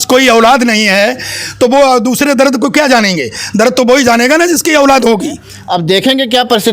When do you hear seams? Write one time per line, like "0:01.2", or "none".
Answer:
0:05.5